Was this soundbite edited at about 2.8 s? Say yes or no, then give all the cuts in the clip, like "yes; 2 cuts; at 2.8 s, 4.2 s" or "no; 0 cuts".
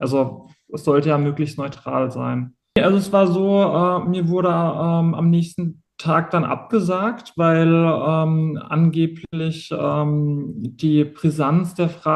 yes; 1 cut; at 2.8 s